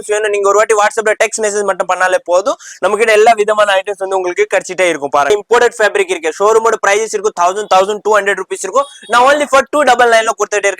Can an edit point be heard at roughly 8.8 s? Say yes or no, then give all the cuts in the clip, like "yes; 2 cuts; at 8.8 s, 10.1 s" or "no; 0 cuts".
no; 1 cut; at 5.3 s